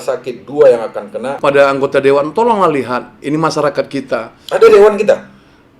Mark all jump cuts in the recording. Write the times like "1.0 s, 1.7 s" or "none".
1.4 s